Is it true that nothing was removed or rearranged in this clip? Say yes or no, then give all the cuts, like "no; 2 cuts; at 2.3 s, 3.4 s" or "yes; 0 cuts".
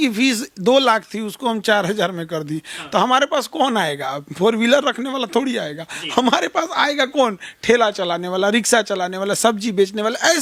yes; 0 cuts